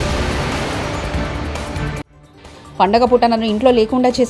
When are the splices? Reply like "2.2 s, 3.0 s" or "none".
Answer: 2.0 s